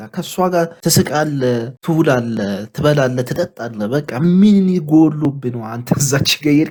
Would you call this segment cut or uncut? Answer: uncut